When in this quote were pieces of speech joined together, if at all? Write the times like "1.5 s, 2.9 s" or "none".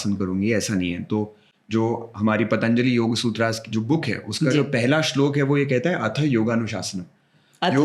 none